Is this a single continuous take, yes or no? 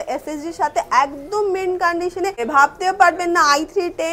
no